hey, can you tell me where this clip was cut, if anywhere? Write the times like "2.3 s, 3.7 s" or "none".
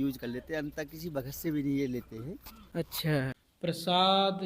3.5 s